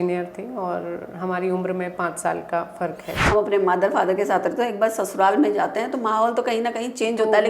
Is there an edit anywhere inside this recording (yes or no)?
yes